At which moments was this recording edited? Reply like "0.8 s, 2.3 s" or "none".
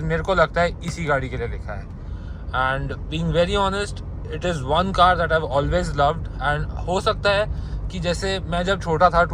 none